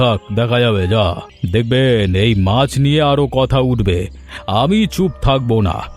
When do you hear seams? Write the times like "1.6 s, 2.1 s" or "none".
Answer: 1.3 s